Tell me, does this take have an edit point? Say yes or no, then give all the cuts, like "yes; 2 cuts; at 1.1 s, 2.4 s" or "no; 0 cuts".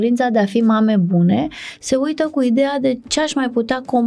yes; 1 cut; at 3.1 s